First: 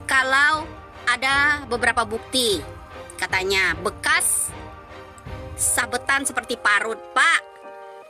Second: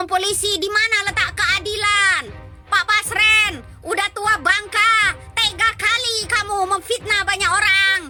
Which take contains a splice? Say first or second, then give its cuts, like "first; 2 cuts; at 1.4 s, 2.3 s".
first; 3 cuts; at 4.2 s, 5.8 s, 7.4 s